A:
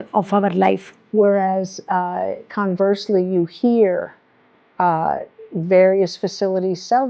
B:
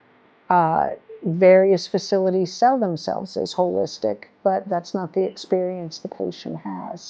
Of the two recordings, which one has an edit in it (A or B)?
A